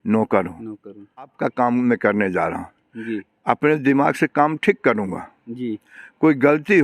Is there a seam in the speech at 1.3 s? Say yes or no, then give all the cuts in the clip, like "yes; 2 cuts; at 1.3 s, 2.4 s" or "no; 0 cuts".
yes; 1 cut; at 1.3 s